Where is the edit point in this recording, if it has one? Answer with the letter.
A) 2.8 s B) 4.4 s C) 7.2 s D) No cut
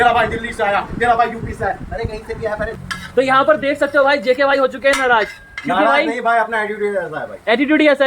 A